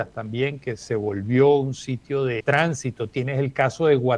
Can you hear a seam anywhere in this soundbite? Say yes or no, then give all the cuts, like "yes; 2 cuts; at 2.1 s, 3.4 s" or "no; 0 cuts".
yes; 1 cut; at 2.4 s